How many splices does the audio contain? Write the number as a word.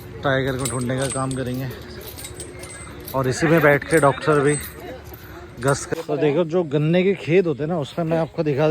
one